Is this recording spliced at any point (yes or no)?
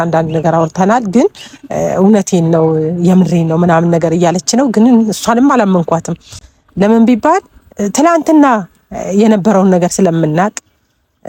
no